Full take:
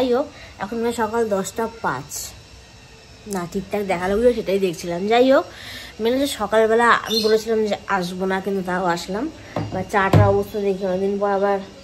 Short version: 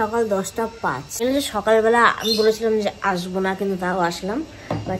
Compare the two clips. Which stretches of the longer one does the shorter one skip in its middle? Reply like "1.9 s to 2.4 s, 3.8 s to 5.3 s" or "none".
2.1 s to 5.9 s